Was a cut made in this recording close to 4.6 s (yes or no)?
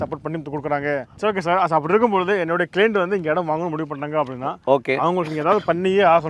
no